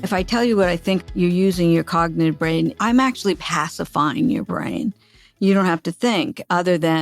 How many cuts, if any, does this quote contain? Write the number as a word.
one